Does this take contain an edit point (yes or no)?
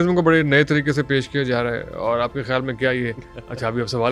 no